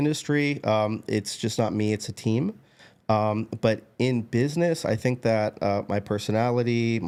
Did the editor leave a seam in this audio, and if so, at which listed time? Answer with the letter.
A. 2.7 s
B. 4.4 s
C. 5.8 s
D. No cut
D